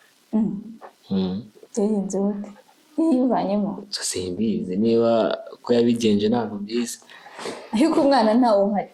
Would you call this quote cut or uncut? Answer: uncut